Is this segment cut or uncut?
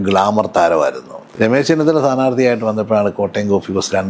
cut